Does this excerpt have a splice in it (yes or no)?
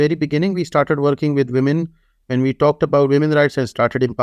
no